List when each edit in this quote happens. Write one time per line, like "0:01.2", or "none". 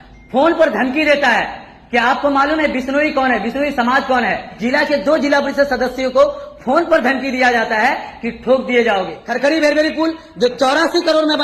0:04.5
0:09.2